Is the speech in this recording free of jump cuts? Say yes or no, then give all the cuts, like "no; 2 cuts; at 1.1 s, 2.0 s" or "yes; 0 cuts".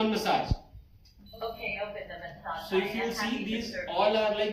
yes; 0 cuts